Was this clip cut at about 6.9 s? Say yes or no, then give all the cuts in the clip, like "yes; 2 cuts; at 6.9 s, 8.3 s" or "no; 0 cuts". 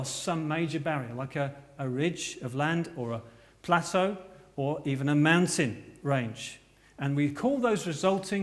no; 1 cut; at 1.1 s